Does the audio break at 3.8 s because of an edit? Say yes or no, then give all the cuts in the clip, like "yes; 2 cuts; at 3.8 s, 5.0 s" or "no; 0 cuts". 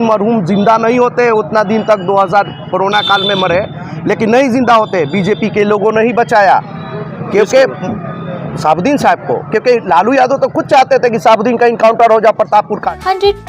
no; 0 cuts